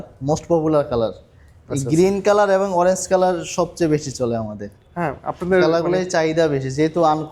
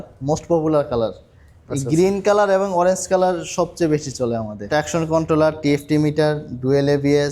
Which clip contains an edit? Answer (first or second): second